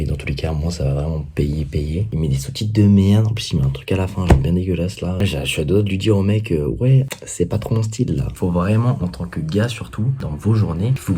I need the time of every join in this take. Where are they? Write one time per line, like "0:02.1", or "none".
0:02.1
0:07.2
0:08.3
0:10.2